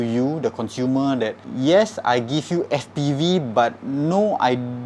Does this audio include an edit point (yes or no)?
yes